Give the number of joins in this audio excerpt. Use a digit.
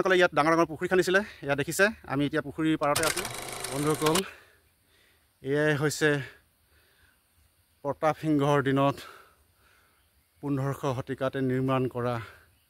1